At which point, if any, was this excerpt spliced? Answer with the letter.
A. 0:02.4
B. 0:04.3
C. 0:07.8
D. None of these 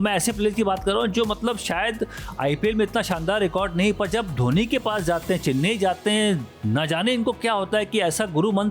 D